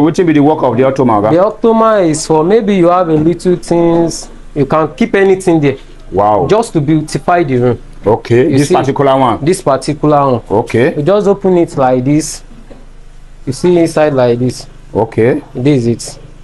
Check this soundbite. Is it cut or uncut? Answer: uncut